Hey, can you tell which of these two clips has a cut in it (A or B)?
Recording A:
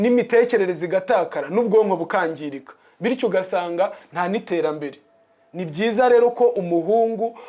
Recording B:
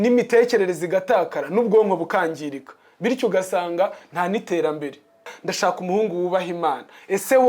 B